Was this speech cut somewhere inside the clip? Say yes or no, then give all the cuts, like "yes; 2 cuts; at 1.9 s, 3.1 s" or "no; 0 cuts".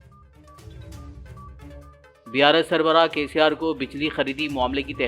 yes; 2 cuts; at 0.7 s, 1.5 s